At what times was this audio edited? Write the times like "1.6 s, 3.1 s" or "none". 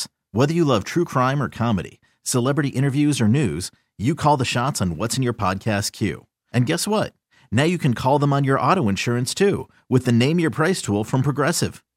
none

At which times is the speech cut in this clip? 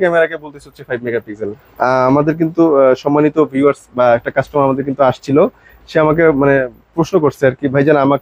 none

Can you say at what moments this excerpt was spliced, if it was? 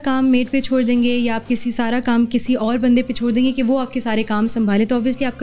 none

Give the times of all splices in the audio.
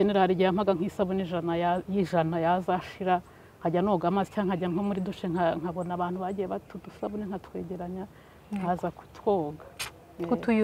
none

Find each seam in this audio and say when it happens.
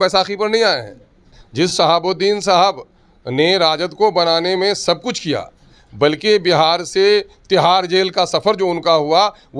1.4 s

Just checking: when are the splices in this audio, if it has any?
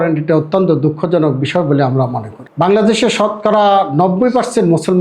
2.4 s

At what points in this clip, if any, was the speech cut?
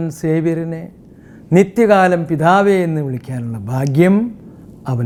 none

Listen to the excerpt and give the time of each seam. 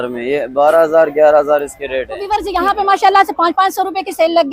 2.2 s

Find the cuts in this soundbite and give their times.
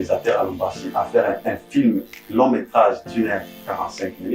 none

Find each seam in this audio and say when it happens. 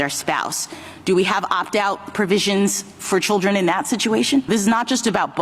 4.5 s

